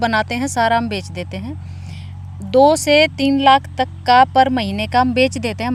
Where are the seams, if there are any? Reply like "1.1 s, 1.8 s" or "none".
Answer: none